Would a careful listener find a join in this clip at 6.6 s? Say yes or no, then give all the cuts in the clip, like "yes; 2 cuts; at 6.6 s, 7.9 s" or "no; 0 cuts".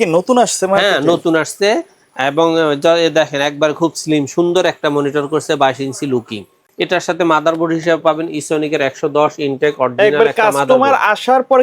yes; 1 cut; at 6.6 s